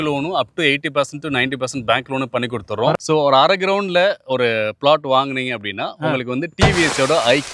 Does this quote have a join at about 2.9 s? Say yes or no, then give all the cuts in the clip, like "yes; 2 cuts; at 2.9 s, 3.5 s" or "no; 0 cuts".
yes; 1 cut; at 2.9 s